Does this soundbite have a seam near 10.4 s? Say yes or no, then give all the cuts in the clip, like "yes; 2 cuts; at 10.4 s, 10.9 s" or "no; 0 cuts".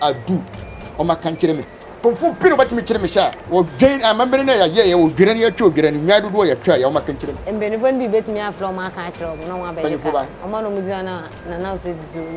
yes; 4 cuts; at 1.8 s, 3.4 s, 7.3 s, 10.4 s